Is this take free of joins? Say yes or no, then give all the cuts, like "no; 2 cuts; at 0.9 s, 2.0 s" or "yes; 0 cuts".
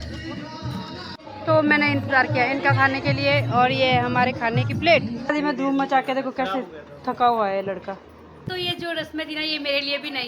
no; 3 cuts; at 1.1 s, 5.3 s, 8.3 s